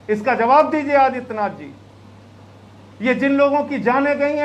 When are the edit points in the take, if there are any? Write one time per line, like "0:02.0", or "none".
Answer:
none